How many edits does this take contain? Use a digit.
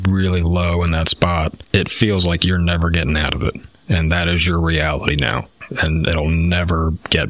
1